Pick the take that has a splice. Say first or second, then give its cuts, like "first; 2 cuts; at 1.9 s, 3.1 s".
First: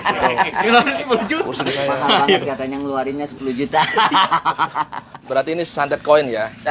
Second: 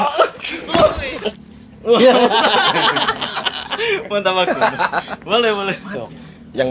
second; 1 cut; at 1.2 s